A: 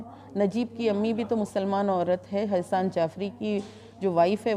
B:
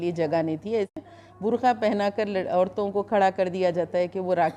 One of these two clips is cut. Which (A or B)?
B